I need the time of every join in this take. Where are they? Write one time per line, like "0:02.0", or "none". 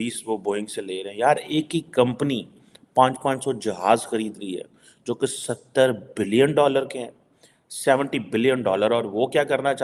none